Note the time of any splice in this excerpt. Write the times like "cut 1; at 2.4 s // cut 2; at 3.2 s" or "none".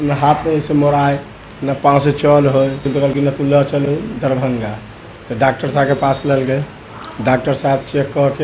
cut 1; at 2.8 s